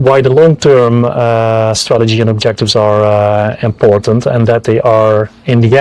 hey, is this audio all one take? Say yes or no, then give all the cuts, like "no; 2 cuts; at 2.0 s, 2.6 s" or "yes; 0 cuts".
yes; 0 cuts